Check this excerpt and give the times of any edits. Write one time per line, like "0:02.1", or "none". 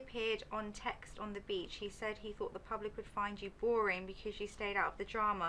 none